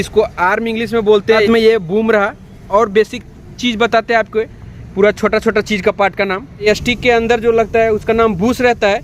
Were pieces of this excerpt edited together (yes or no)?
yes